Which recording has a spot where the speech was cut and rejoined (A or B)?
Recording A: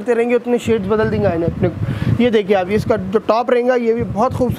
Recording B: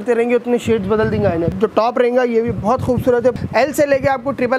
B